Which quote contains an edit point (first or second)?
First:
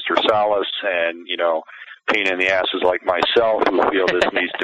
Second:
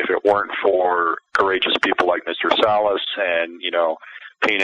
second